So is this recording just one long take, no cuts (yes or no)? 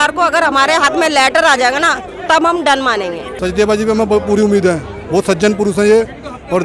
no